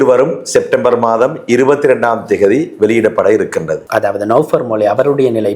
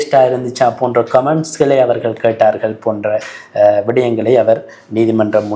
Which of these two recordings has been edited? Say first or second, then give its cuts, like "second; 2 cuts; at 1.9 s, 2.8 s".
first; 1 cut; at 3.8 s